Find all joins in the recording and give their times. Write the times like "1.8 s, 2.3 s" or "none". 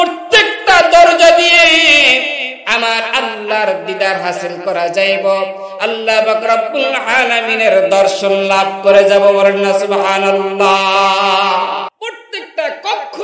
11.9 s

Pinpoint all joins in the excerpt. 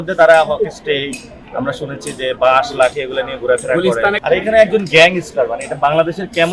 4.2 s

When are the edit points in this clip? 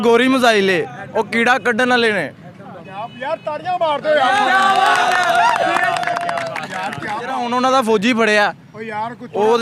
7.4 s

